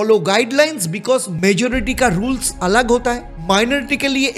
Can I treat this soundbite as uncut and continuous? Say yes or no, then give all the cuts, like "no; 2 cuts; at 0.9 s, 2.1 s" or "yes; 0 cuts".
yes; 0 cuts